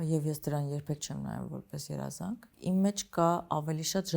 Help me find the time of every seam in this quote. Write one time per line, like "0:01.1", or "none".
0:02.5